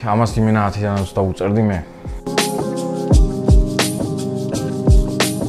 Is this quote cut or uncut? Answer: uncut